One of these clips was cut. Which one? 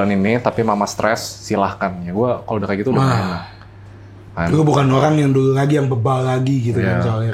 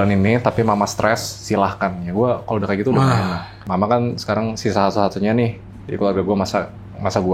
second; 1 cut; at 3.6 s

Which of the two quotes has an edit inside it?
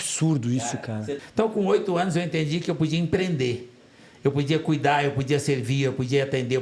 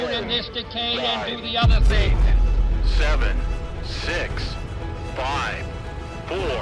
first; 1 cut; at 1.1 s

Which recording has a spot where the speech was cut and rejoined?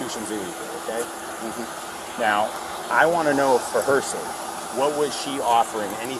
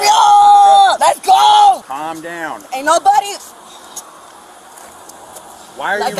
second; 2 cuts; at 1.0 s, 2.0 s

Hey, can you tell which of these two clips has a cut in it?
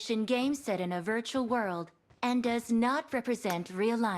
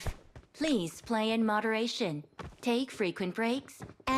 first; 1 cut; at 2.2 s

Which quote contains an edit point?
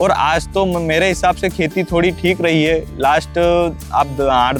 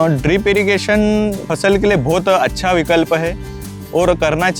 second; 1 cut; at 1.5 s

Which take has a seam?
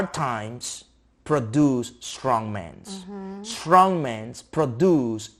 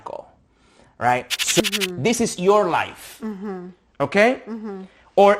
second; 1 cut; at 1.6 s

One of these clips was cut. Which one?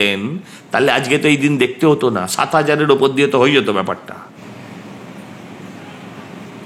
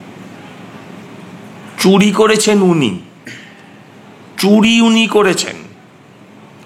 first; 1 cut; at 4.3 s

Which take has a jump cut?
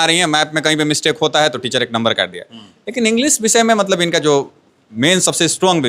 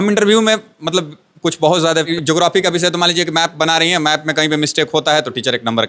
second; 1 cut; at 2.1 s

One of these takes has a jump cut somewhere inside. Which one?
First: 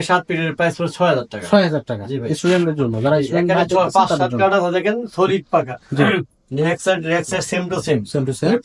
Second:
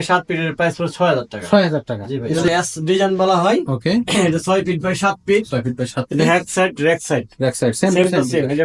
second; 1 cut; at 2.3 s

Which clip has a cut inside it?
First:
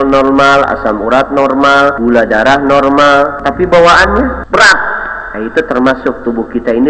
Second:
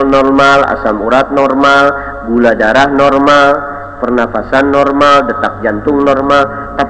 first; 3 cuts; at 2.0 s, 3.4 s, 4.4 s

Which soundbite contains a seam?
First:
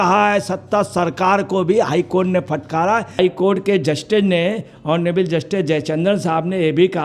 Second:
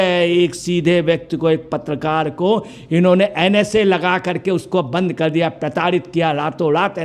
first; 1 cut; at 3.1 s

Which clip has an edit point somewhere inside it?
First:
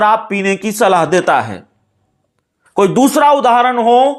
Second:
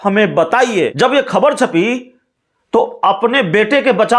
second; 1 cut; at 0.9 s

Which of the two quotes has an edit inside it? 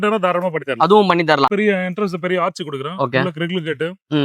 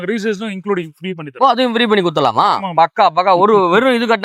first; 1 cut; at 1.5 s

